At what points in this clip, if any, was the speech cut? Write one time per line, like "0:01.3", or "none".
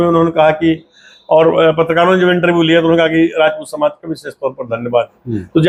none